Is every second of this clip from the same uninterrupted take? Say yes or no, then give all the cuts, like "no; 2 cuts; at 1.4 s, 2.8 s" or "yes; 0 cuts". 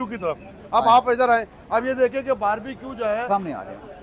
yes; 0 cuts